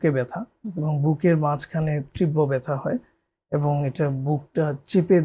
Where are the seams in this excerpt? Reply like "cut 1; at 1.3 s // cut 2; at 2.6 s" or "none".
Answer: none